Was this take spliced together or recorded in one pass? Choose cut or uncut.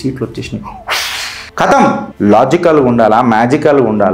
cut